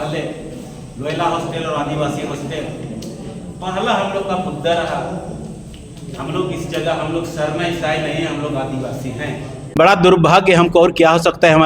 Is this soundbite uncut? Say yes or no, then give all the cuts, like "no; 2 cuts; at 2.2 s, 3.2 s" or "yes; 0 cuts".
no; 1 cut; at 9.6 s